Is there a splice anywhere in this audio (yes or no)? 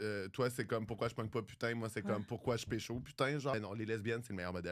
yes